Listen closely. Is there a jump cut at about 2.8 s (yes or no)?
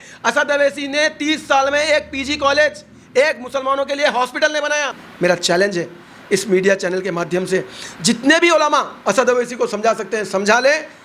no